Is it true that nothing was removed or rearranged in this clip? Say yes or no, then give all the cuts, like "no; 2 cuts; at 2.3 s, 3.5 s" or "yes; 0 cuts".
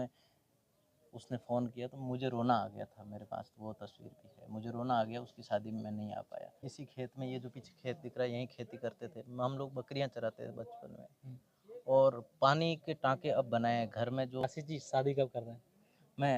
no; 2 cuts; at 6.7 s, 14.4 s